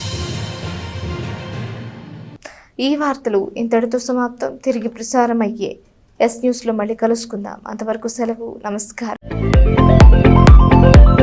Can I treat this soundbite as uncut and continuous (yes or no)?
yes